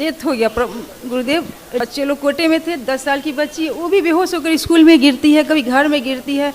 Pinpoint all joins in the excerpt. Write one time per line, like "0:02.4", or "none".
0:01.8